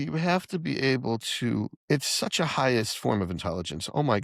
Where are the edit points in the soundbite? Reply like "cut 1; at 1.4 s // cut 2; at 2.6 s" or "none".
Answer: cut 1; at 1.7 s